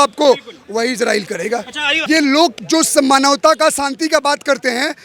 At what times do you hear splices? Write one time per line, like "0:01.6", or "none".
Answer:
0:01.9